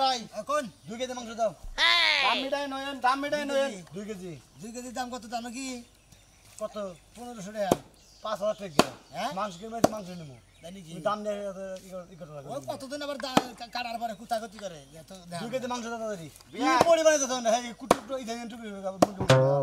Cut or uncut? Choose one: uncut